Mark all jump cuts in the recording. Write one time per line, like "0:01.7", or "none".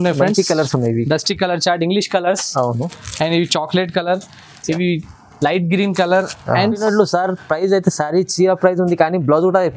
0:06.8